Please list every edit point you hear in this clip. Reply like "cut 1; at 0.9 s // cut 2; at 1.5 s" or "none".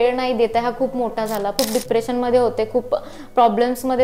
cut 1; at 1.5 s